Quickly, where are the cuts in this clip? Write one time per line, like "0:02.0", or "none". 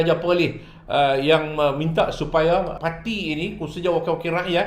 0:02.7

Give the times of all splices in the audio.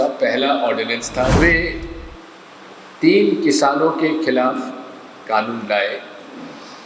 0:01.4

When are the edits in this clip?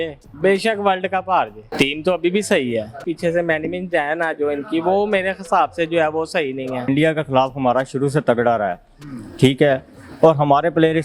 0:01.6
0:03.1
0:06.9

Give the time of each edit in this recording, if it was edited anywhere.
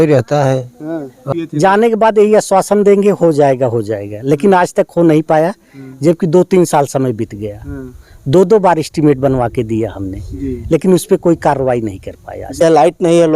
0:01.2
0:12.6

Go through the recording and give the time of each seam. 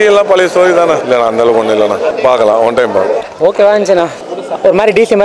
0:01.0
0:02.1
0:04.1

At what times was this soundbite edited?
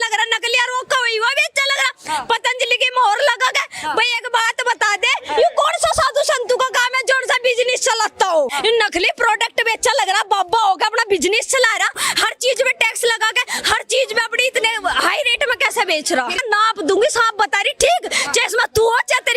0:08.5
0:12.0
0:16.4

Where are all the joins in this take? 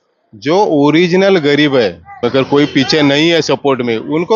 0:02.2

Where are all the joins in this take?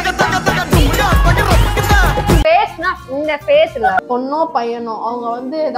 0:04.0

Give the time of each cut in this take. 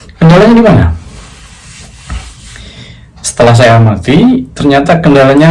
none

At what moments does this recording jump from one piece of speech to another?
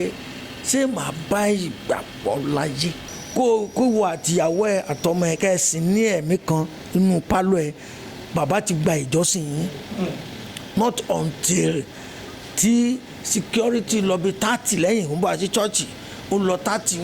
0:03.1

